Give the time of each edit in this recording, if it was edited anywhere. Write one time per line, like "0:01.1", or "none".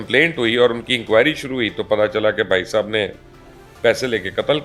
none